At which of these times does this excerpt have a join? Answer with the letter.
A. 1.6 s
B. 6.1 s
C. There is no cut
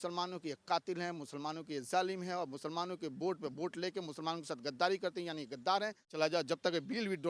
B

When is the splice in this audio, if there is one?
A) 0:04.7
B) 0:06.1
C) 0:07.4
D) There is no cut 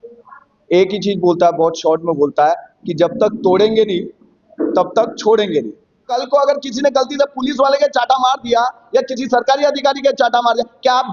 B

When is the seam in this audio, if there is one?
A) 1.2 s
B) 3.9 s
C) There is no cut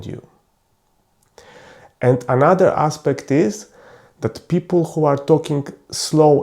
A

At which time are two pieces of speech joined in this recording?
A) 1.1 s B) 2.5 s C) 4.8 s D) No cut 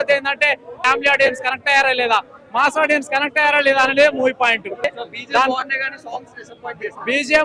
C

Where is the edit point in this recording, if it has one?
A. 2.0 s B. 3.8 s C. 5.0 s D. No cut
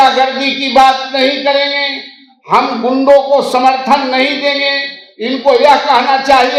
D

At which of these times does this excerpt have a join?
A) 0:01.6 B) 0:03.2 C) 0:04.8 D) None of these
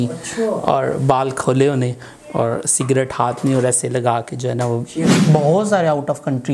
C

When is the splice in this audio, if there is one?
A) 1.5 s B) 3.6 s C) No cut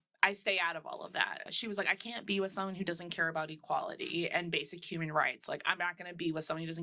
A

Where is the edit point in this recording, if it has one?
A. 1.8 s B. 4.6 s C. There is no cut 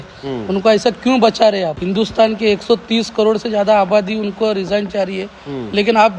A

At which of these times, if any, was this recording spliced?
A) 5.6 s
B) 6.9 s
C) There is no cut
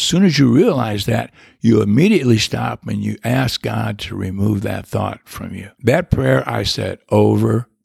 A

